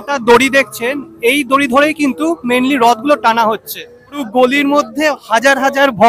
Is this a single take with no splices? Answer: no; 1 cut; at 4.2 s

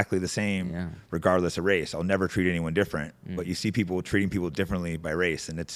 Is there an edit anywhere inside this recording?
no; 0 cuts

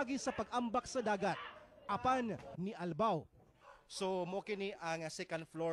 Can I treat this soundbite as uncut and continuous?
yes; 0 cuts

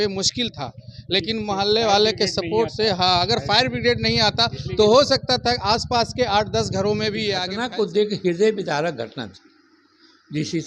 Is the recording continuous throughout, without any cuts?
no; 1 cut; at 7.4 s

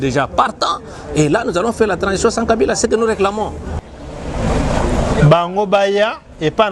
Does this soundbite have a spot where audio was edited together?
yes; 1 cut; at 3.7 s

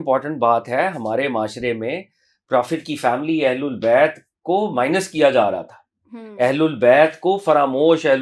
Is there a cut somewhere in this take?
no; 0 cuts

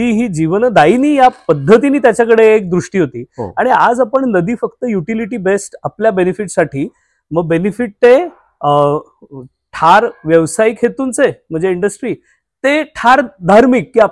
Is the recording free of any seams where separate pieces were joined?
yes; 0 cuts

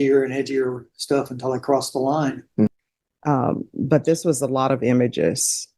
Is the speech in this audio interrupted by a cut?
yes; 1 cut; at 2.7 s

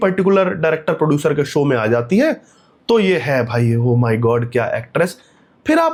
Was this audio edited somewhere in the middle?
no; 0 cuts

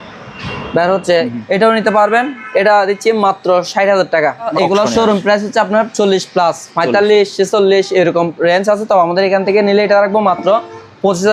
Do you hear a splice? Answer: yes; 2 cuts; at 1.3 s, 4.5 s

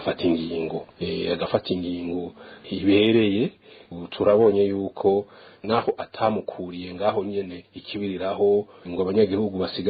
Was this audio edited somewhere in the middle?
no; 0 cuts

